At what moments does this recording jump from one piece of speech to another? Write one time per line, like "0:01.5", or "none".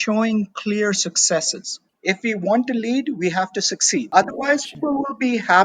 0:01.8
0:04.1
0:04.8